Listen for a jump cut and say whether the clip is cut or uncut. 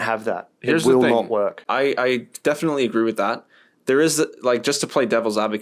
uncut